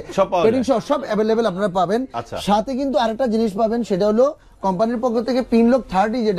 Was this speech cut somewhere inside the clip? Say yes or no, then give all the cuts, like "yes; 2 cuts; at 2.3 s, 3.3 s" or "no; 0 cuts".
no; 0 cuts